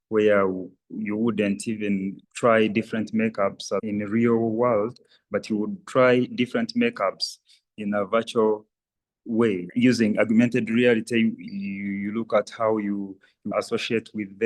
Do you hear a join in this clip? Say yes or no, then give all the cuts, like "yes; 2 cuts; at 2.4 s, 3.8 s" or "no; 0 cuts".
no; 0 cuts